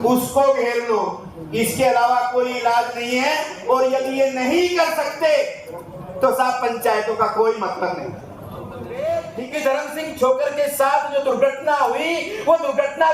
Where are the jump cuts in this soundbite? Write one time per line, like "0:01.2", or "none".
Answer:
0:08.8